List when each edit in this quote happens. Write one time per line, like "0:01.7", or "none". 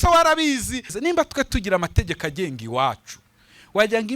0:00.9